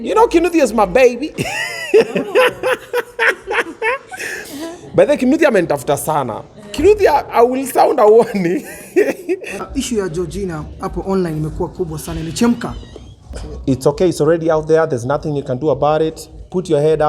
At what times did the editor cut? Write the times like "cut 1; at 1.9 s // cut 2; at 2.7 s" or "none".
cut 1; at 9.6 s // cut 2; at 13.4 s